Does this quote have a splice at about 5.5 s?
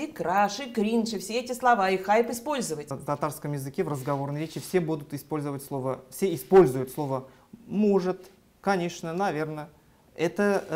no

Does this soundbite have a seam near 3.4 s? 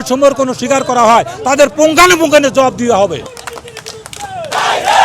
yes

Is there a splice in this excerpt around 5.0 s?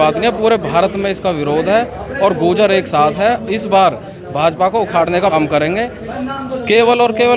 no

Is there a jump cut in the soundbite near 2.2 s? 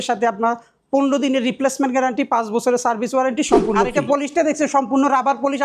no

